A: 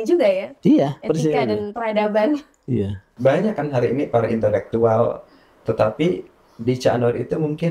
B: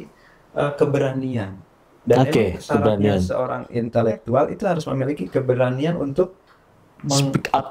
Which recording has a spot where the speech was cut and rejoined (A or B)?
A